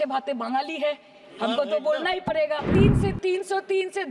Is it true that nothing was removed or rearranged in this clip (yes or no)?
no